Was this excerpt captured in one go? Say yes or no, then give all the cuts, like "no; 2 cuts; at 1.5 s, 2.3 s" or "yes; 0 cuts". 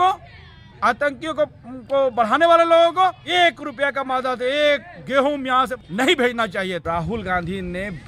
no; 3 cuts; at 3.2 s, 5.7 s, 6.9 s